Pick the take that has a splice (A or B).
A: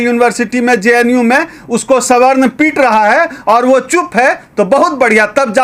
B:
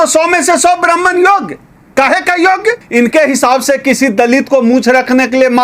B